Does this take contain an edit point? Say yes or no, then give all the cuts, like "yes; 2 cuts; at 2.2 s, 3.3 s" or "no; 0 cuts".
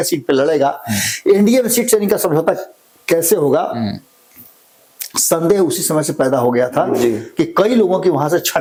no; 0 cuts